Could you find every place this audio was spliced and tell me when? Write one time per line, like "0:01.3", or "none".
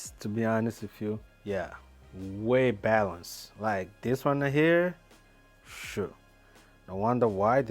0:01.3